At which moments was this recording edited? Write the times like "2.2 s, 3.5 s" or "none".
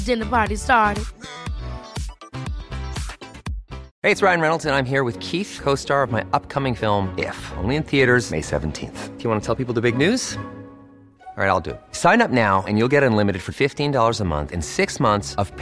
3.8 s